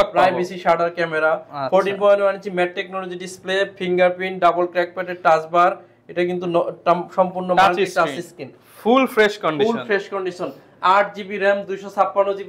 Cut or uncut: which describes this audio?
uncut